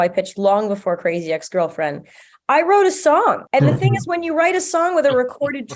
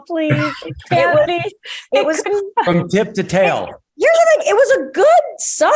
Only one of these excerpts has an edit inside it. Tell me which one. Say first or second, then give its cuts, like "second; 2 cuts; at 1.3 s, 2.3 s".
first; 1 cut; at 3.4 s